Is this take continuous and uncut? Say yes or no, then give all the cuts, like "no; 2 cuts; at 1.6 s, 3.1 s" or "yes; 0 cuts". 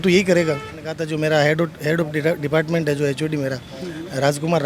no; 1 cut; at 0.9 s